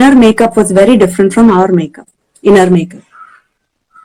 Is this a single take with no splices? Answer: yes; 0 cuts

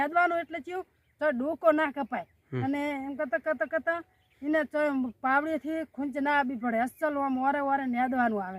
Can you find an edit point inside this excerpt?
no; 0 cuts

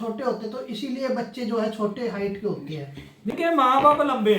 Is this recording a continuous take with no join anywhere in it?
no; 1 cut; at 3.3 s

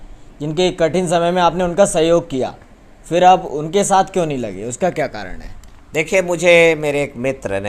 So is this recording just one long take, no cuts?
yes; 0 cuts

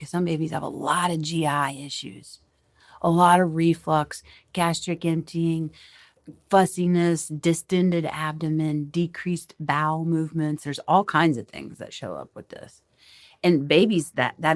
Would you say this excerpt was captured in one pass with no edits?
yes; 0 cuts

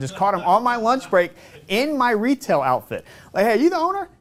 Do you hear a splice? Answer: no; 0 cuts

